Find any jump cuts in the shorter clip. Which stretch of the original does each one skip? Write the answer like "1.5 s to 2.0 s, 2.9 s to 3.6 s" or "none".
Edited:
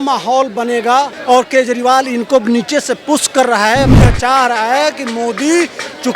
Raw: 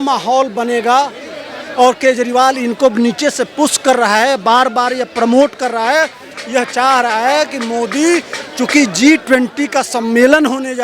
1.2 s to 1.7 s, 4.4 s to 6.4 s